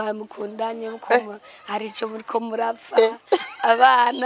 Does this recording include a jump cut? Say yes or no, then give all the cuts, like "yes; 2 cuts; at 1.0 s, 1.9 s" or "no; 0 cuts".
no; 0 cuts